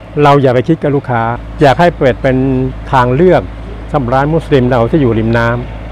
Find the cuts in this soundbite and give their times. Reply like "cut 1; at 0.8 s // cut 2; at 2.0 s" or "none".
cut 1; at 1.4 s